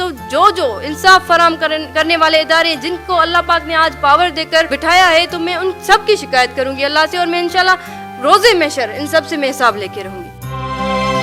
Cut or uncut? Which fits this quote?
uncut